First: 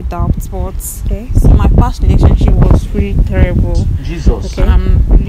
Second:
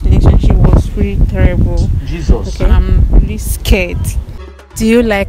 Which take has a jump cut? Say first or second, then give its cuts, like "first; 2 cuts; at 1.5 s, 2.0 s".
second; 1 cut; at 4.3 s